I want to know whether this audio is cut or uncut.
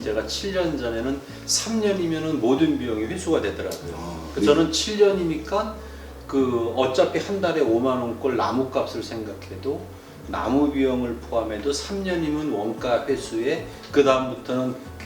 uncut